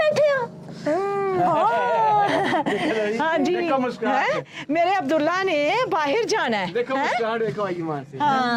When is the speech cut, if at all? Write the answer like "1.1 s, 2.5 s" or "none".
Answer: none